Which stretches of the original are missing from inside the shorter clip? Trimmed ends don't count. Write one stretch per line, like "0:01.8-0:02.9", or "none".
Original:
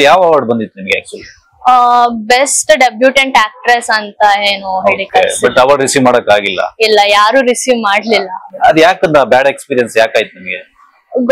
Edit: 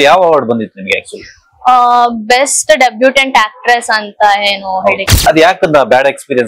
0:05.0-0:08.4